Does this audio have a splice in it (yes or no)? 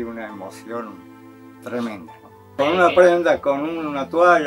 yes